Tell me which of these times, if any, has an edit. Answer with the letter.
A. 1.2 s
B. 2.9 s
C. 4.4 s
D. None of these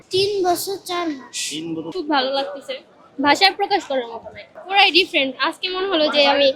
D